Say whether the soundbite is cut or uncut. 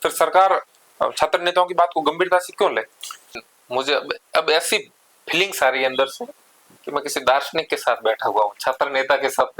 cut